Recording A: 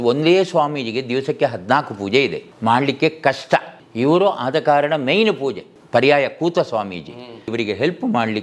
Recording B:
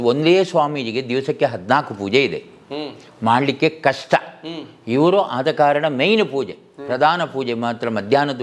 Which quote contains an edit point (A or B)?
A